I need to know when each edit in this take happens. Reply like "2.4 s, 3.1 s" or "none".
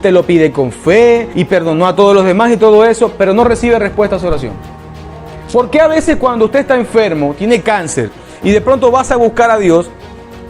1.3 s